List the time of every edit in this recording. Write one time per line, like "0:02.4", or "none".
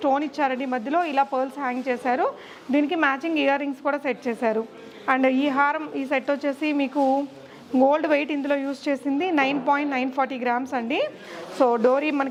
none